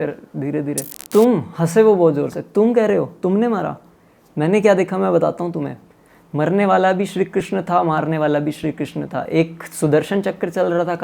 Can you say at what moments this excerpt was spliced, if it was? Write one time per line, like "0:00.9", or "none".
0:00.9